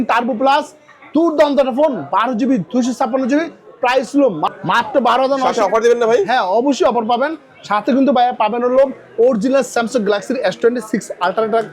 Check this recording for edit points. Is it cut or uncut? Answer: cut